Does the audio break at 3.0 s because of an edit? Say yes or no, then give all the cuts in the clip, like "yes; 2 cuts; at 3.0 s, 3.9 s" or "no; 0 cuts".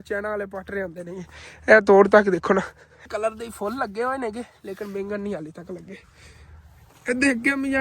yes; 1 cut; at 3.0 s